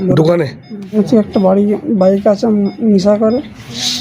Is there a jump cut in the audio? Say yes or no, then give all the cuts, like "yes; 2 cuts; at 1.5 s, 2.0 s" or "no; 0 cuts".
yes; 1 cut; at 1.0 s